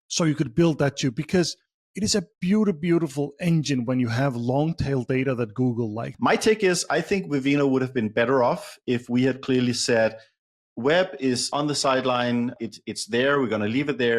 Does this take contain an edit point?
yes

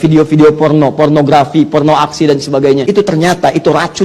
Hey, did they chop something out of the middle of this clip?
yes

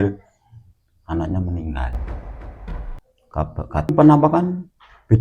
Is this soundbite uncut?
no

